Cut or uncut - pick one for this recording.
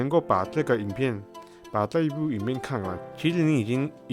cut